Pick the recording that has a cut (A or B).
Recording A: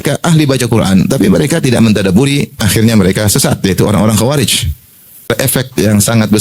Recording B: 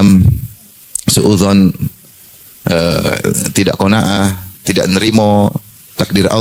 A